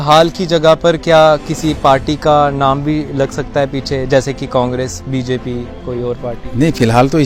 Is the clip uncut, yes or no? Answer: yes